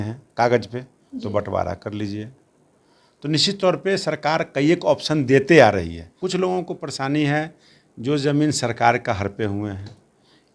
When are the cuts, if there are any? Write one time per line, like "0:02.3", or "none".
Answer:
0:06.1